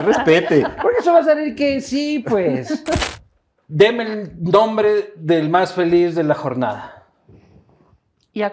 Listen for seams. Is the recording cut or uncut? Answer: cut